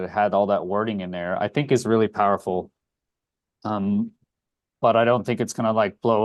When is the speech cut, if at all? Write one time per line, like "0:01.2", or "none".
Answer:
none